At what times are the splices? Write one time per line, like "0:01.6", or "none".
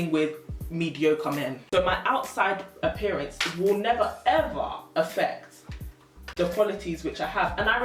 0:01.6